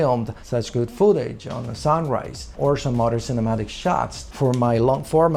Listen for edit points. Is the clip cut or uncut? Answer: uncut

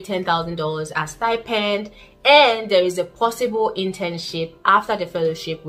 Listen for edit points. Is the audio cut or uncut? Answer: uncut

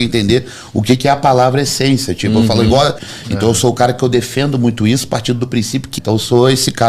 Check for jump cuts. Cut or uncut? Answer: cut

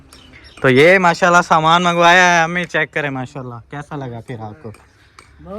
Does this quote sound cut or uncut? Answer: uncut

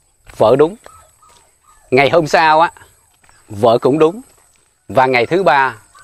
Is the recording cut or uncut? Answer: uncut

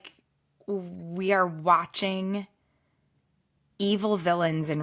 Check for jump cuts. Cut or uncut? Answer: uncut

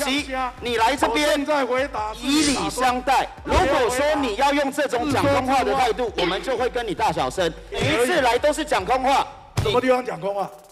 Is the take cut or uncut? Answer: cut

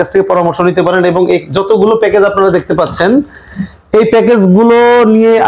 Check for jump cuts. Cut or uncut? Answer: uncut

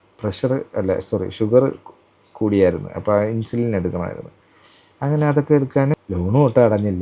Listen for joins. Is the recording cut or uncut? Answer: cut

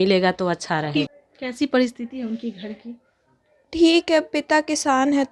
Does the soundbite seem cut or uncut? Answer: cut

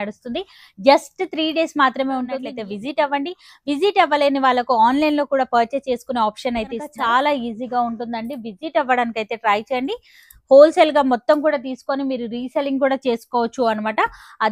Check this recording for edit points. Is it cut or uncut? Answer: cut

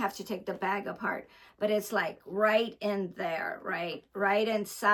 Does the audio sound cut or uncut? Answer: uncut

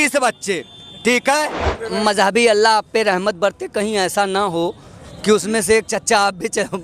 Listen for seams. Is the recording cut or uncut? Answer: cut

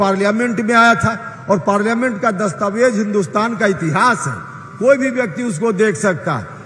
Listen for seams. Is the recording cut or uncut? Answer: uncut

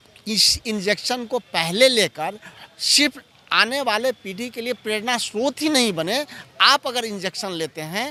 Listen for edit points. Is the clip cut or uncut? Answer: uncut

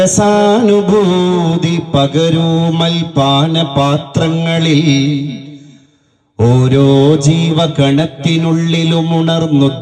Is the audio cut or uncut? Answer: uncut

